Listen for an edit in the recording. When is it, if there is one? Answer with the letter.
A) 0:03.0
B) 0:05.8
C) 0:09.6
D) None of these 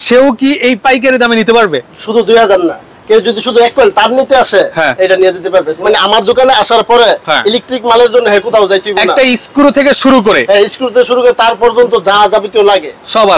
B